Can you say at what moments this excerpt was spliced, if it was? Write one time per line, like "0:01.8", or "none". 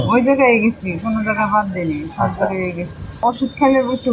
0:03.2